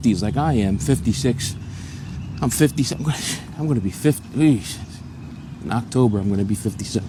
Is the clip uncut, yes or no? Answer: yes